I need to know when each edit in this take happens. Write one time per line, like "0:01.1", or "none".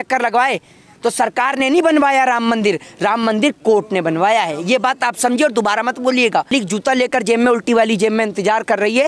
0:06.5